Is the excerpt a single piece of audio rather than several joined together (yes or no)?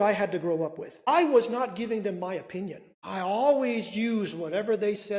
no